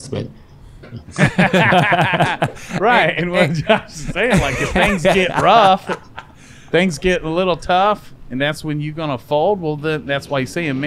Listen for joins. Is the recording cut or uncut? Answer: uncut